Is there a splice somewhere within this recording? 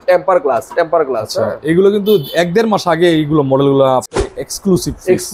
yes; 1 cut; at 4.1 s

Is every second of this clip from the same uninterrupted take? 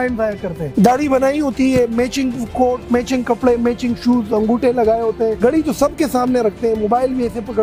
yes; 0 cuts

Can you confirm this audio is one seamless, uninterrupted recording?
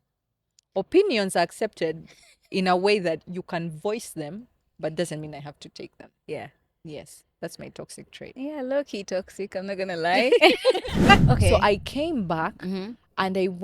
no; 1 cut; at 11.2 s

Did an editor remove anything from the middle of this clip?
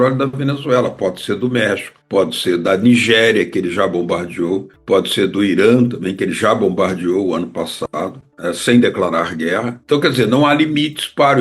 no; 0 cuts

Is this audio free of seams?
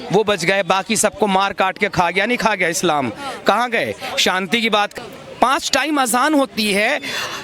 no; 1 cut; at 4.9 s

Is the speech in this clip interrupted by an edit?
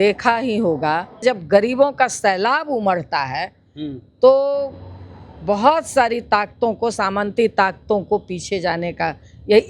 yes; 1 cut; at 1.2 s

